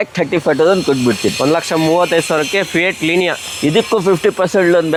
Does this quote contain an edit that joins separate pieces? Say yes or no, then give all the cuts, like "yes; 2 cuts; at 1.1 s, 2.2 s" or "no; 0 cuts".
no; 0 cuts